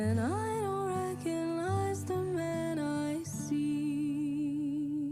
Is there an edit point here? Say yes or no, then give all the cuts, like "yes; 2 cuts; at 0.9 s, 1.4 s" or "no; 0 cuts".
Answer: no; 0 cuts